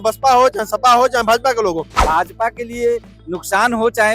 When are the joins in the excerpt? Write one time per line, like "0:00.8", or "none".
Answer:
0:02.0